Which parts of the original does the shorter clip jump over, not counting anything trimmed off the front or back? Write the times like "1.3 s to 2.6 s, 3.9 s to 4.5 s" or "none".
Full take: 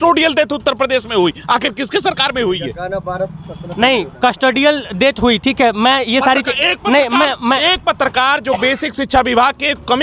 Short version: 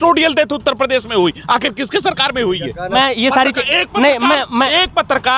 2.9 s to 5.8 s